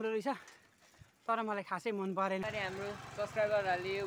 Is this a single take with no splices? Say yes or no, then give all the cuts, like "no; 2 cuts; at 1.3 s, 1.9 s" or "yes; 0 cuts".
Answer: no; 1 cut; at 2.4 s